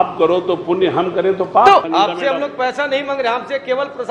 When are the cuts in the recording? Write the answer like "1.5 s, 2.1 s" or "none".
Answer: 1.9 s